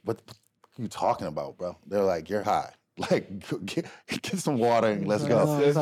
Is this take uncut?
yes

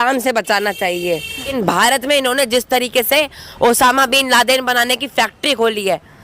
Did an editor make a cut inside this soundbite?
yes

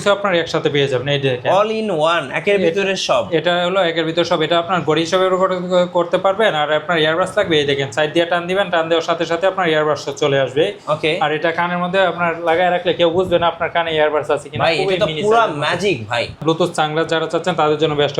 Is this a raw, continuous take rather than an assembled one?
no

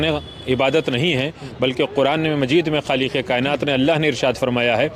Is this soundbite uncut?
yes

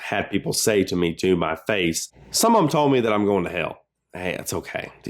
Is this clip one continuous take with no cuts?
no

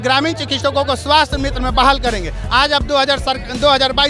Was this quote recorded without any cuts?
yes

